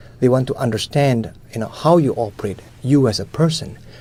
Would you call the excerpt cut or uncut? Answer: uncut